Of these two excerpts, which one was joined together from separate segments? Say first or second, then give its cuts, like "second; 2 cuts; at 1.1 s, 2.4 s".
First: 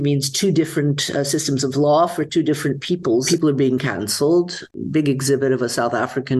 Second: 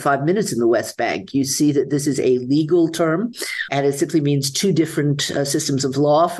first; 2 cuts; at 3.3 s, 4.7 s